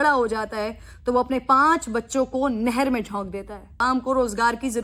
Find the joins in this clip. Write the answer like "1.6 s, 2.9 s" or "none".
3.8 s